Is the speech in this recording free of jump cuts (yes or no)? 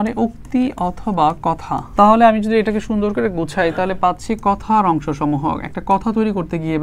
no